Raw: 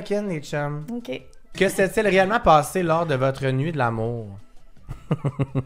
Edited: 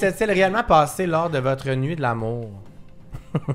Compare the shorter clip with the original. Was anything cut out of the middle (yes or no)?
no